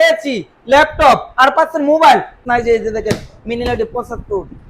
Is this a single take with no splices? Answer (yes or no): no